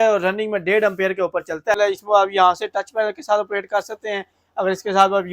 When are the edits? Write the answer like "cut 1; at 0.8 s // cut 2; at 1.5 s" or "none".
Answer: cut 1; at 1.7 s